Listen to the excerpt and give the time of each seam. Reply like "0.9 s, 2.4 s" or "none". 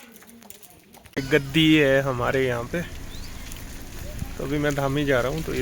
1.2 s